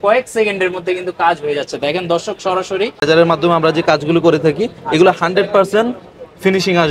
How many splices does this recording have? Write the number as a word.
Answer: one